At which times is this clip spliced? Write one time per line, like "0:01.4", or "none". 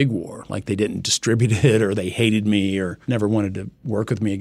0:03.0